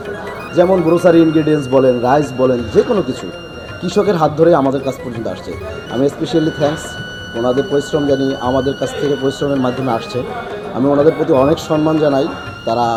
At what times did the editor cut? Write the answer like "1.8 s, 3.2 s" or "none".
none